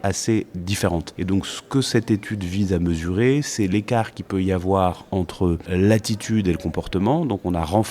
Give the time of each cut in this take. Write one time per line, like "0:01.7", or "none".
0:01.1
0:05.7